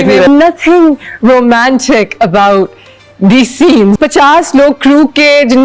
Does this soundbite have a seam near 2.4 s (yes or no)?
no